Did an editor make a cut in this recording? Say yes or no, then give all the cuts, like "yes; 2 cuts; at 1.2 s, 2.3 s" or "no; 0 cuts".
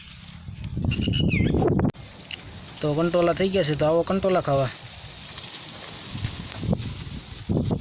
yes; 1 cut; at 2.1 s